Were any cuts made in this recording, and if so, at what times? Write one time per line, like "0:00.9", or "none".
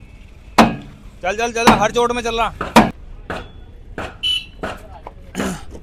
none